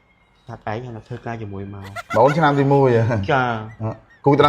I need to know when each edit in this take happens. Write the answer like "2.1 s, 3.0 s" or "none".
1.9 s

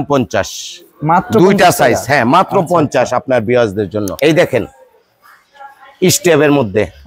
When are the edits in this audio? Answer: 4.1 s

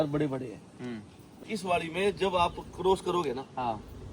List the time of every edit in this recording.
1.3 s

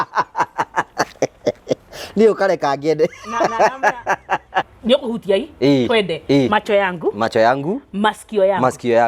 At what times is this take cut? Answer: 4.7 s

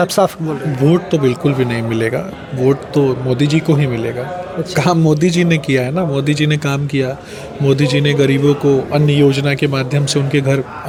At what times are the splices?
none

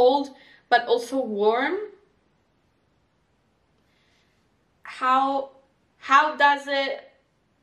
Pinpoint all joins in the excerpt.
none

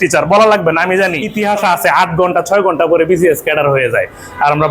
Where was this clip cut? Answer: 1.3 s

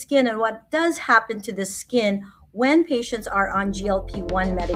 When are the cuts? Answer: none

